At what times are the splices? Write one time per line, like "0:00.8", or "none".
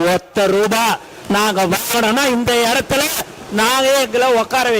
none